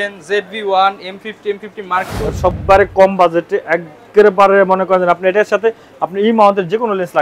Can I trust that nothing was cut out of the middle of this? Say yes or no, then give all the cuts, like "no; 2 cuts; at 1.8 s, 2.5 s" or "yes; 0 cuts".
no; 1 cut; at 2.6 s